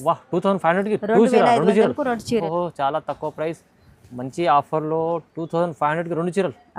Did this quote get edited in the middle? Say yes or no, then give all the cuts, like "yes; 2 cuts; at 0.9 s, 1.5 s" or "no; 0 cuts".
no; 0 cuts